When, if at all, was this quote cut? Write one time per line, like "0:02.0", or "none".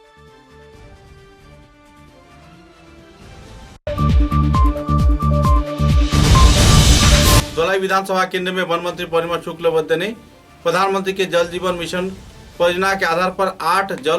0:03.8
0:07.4